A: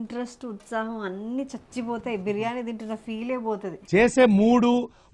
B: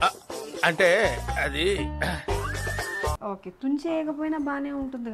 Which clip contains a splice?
B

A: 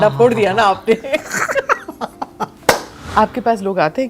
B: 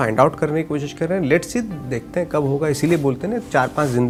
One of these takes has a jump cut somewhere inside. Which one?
A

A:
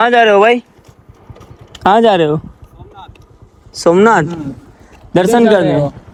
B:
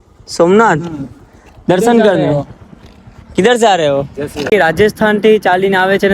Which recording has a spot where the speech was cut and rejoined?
B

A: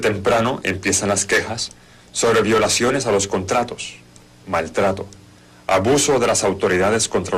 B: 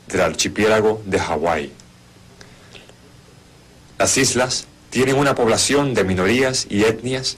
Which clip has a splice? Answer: A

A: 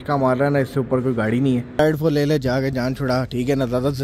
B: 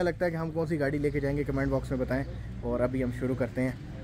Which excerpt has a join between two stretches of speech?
A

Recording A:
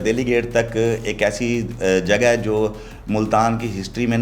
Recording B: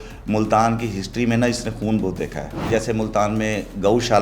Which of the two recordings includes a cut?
B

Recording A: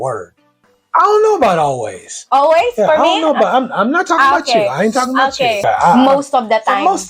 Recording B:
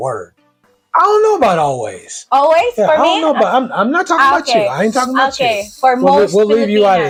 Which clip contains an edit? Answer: A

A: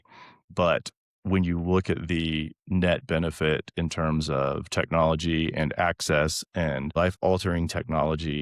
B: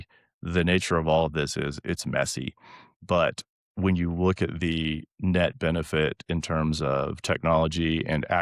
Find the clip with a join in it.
A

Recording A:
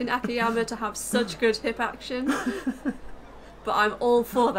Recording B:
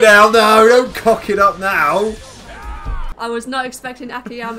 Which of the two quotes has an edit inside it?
B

